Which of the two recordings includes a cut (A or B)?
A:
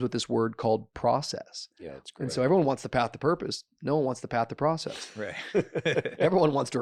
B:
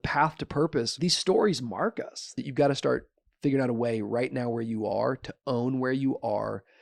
B